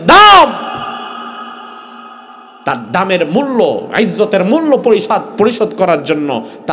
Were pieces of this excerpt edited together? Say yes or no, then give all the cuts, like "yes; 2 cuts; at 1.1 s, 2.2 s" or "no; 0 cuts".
no; 0 cuts